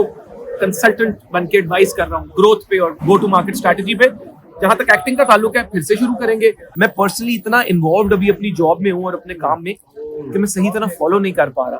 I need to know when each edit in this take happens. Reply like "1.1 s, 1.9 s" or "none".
6.7 s